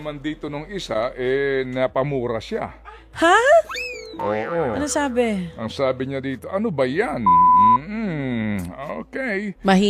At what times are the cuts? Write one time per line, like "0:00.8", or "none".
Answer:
none